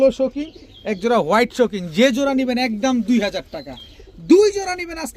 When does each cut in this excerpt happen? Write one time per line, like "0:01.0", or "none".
none